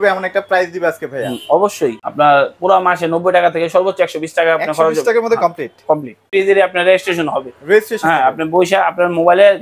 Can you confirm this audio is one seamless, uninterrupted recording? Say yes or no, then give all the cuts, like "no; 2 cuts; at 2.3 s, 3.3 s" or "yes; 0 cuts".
no; 2 cuts; at 2.0 s, 6.3 s